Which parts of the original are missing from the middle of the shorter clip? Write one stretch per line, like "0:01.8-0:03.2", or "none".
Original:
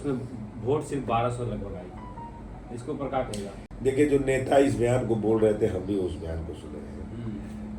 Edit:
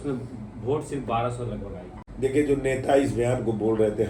0:02.0-0:03.6